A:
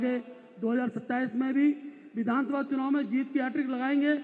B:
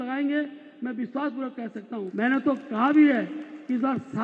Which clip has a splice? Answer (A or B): B